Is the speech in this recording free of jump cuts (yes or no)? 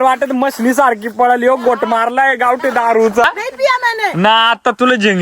no